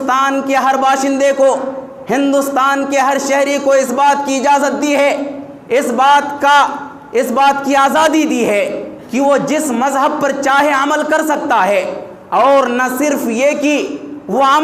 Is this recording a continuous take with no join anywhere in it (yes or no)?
yes